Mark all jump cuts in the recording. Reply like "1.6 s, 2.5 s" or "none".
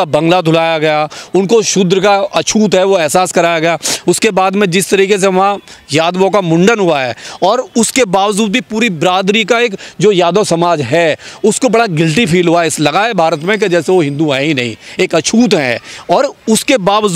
none